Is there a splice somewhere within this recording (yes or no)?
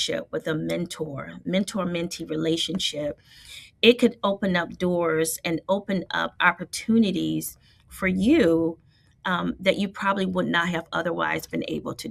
no